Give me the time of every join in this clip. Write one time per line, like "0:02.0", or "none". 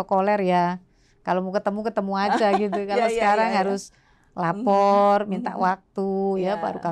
none